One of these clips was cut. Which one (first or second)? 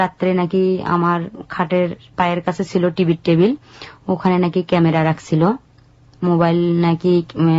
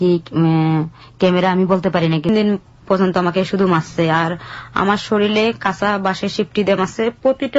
second